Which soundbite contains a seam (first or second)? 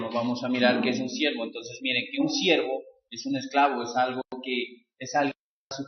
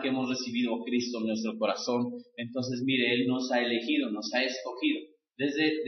first